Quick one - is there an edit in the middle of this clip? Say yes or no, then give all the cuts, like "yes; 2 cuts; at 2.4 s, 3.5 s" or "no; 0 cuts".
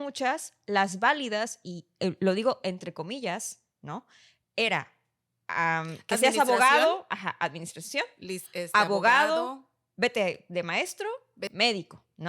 yes; 1 cut; at 11.4 s